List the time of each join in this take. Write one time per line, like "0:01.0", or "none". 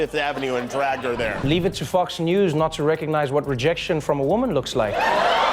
0:01.4

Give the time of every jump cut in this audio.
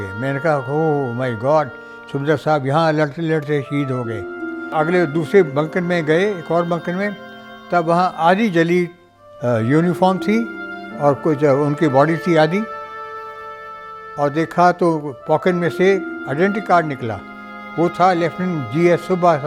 0:04.7

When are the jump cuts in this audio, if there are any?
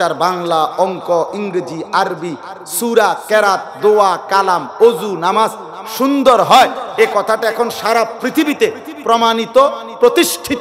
none

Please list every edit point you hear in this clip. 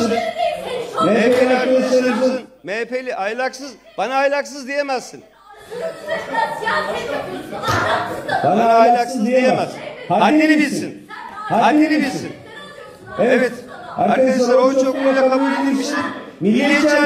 none

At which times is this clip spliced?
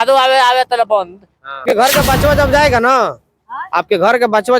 0:01.6

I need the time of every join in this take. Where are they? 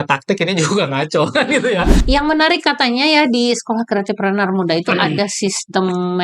0:02.0

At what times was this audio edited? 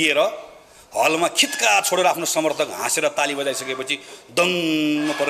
none

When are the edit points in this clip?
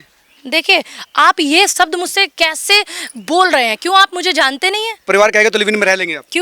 0:04.9

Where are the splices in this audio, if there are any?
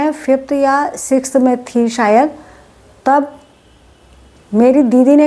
none

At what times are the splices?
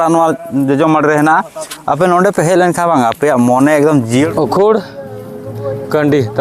0:04.3

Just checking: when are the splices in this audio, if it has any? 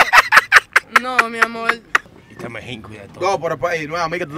0:02.1

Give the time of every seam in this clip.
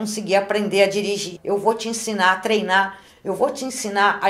0:01.3

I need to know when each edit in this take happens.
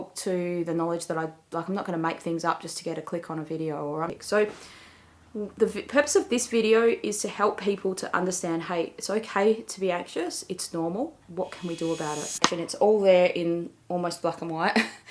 0:04.2
0:12.6

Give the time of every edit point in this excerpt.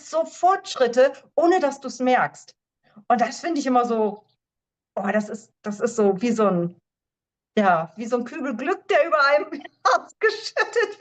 none

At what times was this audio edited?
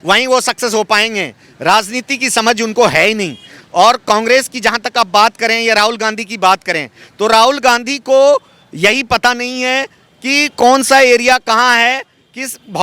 none

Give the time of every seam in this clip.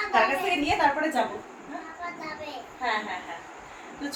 none

